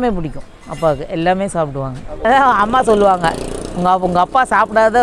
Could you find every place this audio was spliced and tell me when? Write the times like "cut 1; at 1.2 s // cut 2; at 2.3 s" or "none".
cut 1; at 2.2 s